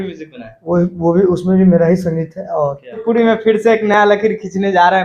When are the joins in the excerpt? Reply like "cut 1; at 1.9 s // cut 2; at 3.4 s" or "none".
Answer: cut 1; at 3.0 s